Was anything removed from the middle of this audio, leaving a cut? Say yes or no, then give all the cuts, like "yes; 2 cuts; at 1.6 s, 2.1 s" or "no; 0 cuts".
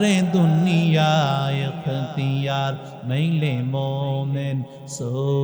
no; 0 cuts